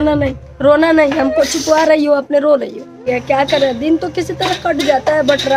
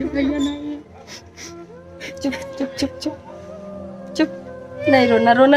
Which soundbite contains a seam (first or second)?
first